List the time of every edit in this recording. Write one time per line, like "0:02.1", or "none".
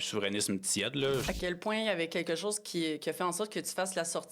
0:01.2

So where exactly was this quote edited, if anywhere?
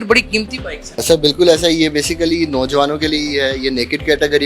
0:01.0

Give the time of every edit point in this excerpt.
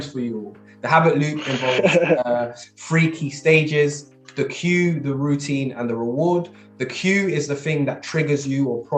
none

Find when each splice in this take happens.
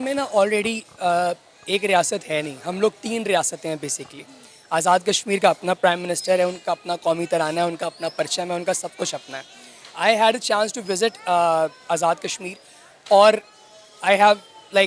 none

